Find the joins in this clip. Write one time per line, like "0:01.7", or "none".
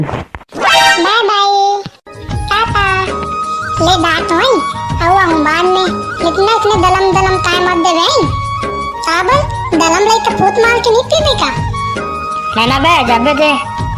none